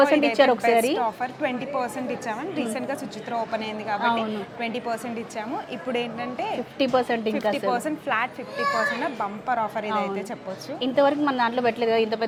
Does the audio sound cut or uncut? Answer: uncut